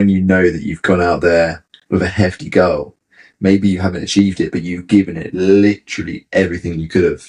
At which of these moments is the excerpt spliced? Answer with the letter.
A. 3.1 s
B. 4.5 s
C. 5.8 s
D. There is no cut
D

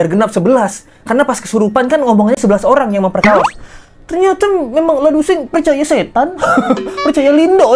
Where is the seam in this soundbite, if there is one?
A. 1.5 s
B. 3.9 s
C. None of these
C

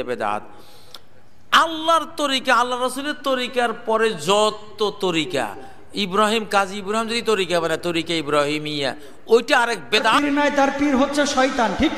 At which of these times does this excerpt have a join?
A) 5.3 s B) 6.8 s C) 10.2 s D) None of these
C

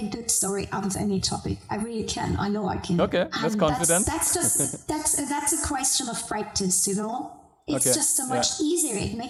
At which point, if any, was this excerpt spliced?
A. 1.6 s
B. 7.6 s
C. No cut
C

